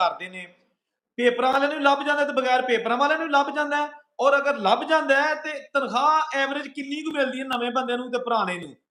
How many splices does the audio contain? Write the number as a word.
zero